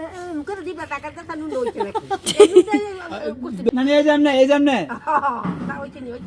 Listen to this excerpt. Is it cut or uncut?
uncut